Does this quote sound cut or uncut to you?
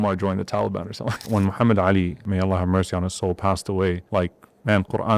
cut